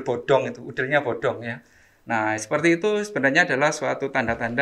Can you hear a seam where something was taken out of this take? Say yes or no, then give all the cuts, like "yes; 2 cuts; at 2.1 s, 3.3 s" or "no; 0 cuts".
no; 0 cuts